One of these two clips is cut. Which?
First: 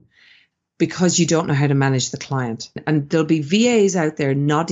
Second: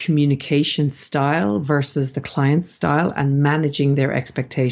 first; 1 cut; at 2.8 s

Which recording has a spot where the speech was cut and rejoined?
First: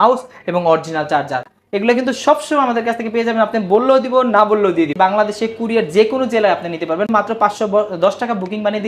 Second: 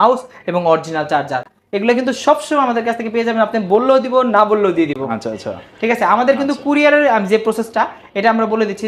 first; 2 cuts; at 4.9 s, 7.1 s

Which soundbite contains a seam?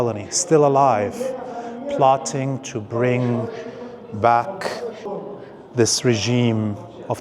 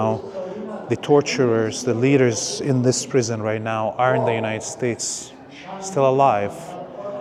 first; 1 cut; at 5.0 s

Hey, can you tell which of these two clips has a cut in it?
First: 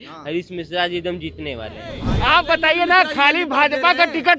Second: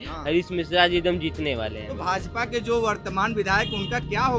first; 1 cut; at 2.0 s

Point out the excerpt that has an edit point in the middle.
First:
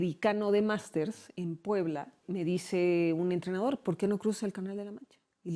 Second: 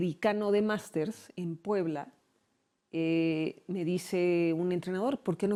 first; 1 cut; at 2.2 s

